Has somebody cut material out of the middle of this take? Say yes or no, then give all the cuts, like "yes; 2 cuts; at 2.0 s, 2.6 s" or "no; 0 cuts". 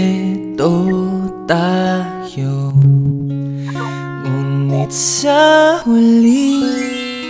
no; 0 cuts